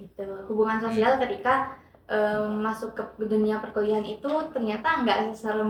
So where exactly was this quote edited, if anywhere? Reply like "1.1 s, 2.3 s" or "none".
none

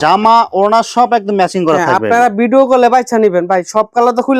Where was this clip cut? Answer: none

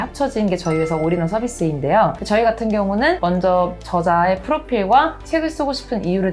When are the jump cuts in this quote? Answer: none

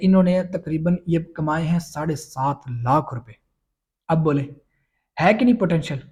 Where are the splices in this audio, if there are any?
none

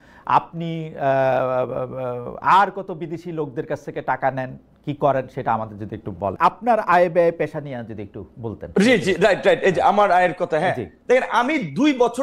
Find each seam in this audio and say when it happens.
6.3 s

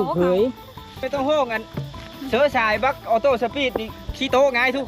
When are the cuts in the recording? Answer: 1.0 s

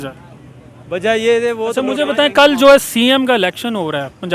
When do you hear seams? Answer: 1.9 s

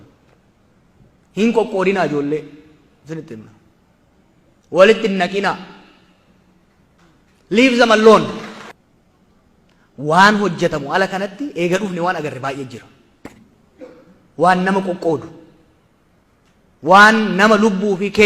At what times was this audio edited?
8.7 s

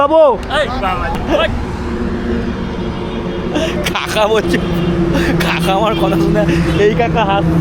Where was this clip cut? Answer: 1.2 s

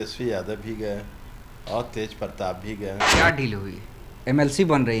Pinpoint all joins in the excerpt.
3.1 s

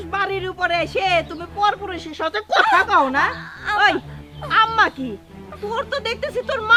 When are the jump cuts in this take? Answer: none

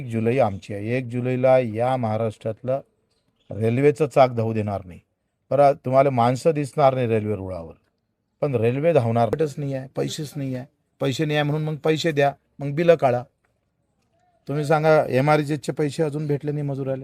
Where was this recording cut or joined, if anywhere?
9.3 s

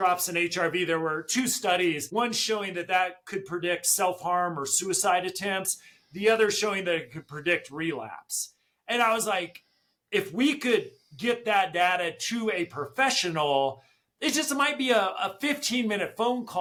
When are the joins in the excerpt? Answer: none

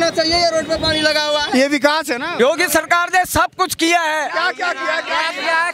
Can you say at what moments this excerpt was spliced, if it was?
2.3 s

